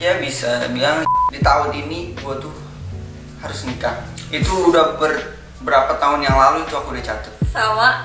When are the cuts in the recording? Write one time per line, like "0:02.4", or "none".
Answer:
0:01.1

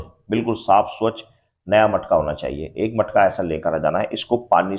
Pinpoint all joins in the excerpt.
none

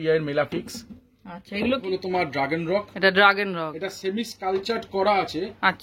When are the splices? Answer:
0:01.8

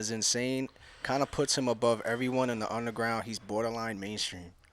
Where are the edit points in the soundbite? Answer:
none

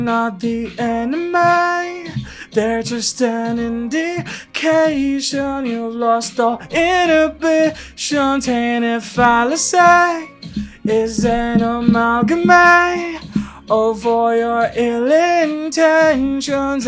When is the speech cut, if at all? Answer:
none

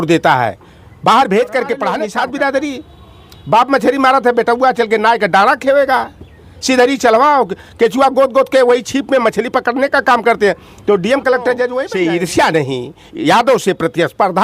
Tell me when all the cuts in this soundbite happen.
0:02.0
0:11.8

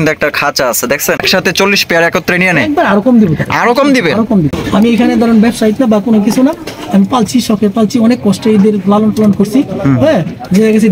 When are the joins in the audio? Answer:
0:01.2
0:04.5

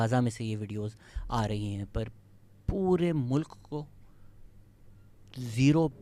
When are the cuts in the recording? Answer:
none

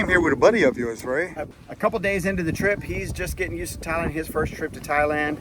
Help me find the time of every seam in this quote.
0:01.4

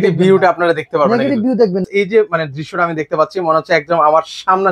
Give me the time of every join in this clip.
0:01.9

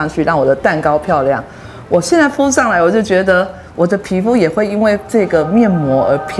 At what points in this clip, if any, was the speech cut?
none

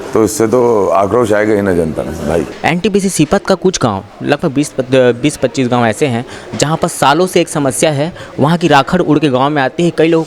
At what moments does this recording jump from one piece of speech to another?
0:02.5

